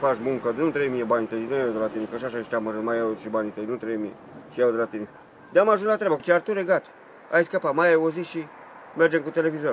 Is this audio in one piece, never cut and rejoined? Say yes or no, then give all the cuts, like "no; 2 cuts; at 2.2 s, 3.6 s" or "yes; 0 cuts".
no; 1 cut; at 6.2 s